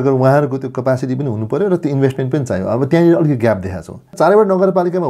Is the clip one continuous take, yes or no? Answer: no